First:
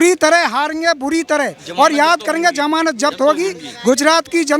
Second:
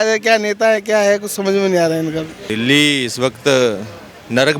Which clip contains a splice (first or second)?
second